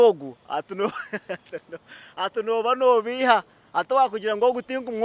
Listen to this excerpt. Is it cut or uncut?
uncut